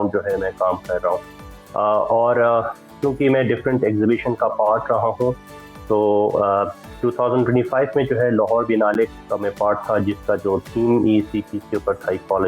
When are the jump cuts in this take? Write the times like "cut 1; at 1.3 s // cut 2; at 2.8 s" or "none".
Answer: none